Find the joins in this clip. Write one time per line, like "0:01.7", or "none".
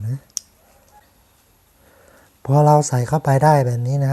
0:01.1